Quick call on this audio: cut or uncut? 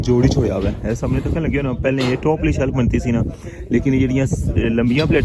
uncut